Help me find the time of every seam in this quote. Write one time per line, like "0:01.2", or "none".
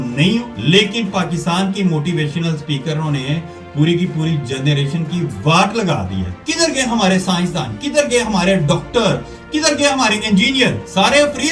none